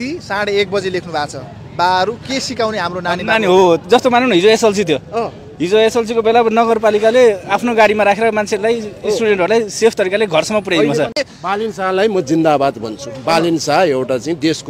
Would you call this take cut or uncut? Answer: cut